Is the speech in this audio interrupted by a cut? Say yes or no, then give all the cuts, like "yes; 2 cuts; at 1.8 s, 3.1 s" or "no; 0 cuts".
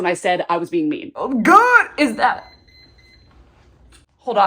yes; 1 cut; at 1.1 s